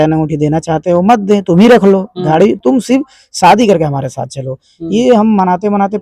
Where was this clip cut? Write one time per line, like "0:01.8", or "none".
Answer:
none